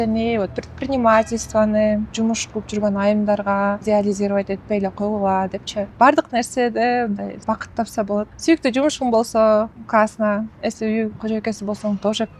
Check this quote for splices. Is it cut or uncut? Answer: cut